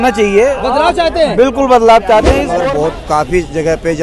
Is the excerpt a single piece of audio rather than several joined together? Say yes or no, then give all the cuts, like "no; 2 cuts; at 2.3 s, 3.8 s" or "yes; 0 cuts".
no; 1 cut; at 2.6 s